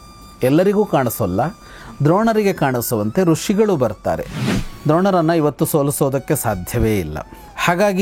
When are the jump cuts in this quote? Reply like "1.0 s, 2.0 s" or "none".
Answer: 4.6 s